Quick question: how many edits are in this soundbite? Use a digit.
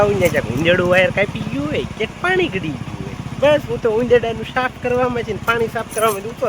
0